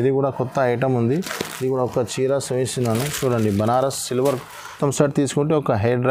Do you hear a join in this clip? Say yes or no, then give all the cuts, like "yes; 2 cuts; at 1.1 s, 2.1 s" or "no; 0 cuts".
yes; 1 cut; at 4.8 s